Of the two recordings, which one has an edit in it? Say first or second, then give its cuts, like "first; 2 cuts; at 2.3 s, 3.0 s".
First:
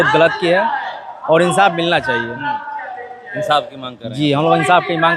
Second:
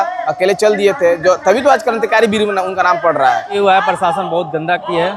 second; 1 cut; at 3.6 s